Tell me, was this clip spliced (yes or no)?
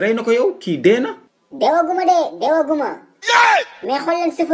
no